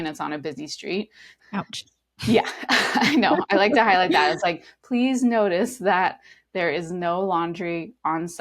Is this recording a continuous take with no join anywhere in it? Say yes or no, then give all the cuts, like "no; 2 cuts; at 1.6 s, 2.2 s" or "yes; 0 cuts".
no; 1 cut; at 1.4 s